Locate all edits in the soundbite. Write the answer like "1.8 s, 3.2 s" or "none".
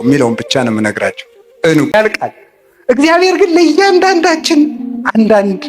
1.9 s